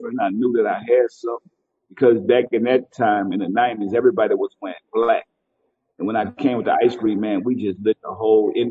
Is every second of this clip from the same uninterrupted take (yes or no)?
yes